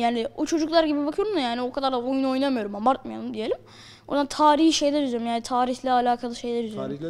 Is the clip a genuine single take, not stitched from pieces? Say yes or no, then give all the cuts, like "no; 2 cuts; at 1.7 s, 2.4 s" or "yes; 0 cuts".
yes; 0 cuts